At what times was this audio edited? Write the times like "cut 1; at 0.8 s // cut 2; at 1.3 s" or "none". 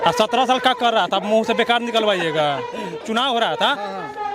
cut 1; at 3.0 s